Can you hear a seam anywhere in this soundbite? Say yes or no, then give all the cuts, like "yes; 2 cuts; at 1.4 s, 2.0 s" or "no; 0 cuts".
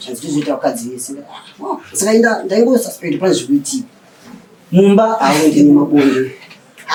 no; 0 cuts